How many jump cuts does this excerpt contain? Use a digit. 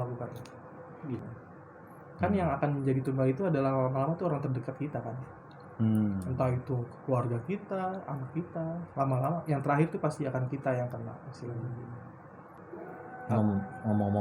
2